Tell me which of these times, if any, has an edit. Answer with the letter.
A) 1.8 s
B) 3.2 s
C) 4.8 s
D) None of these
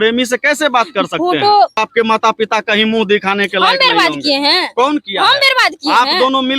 A